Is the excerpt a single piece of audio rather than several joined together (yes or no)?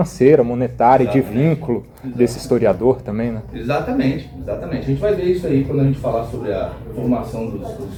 yes